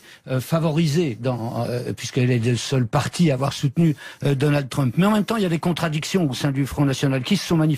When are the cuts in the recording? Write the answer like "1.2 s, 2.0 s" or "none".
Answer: 1.8 s